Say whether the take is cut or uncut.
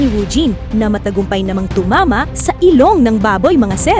uncut